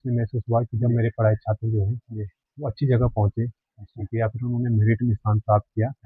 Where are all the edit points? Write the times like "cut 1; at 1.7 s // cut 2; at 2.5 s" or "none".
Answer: none